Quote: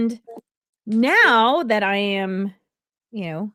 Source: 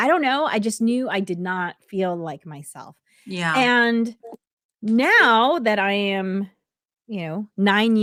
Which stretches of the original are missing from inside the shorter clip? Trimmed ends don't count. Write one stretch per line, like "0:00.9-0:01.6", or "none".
none